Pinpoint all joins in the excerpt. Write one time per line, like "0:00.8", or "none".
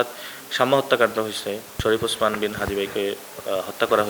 0:01.8